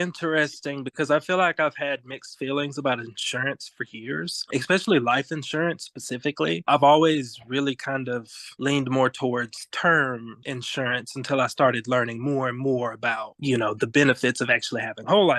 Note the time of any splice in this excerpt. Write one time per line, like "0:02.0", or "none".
none

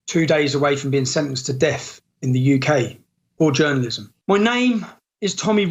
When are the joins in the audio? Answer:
0:04.0

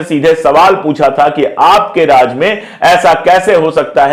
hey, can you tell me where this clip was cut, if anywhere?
none

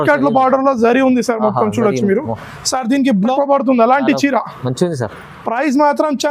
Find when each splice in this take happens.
0:03.3

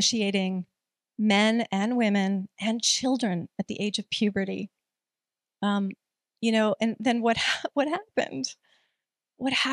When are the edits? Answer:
none

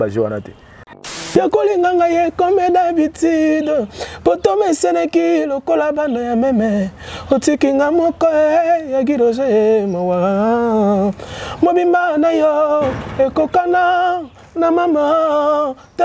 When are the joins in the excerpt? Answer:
0:01.0

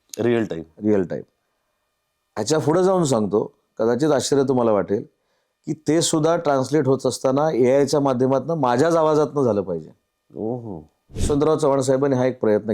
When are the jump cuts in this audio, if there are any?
0:11.2

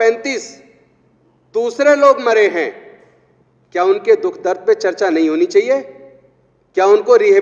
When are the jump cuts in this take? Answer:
none

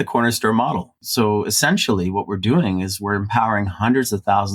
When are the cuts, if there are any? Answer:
0:00.9

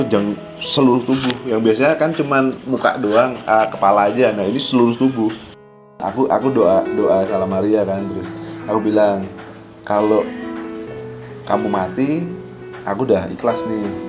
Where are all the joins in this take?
0:05.8

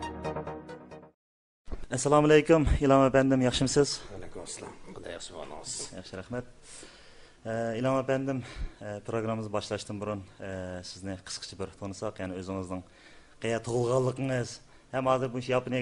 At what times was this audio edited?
none

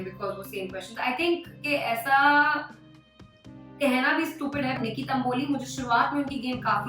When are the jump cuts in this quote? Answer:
0:04.8

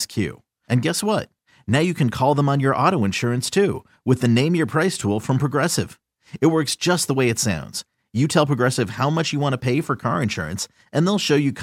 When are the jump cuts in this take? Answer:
none

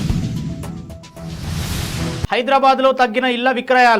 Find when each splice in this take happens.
0:02.0

